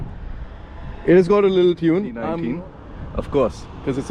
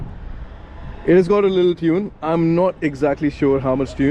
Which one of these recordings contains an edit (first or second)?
first